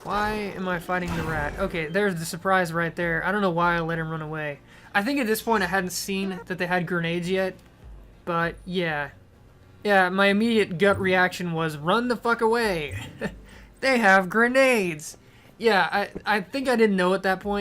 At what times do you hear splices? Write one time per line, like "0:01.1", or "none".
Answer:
0:16.2